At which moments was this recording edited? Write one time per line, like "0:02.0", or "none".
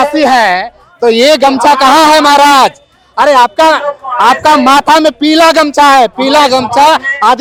none